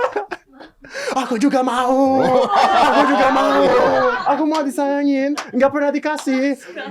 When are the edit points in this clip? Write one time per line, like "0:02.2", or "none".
0:04.2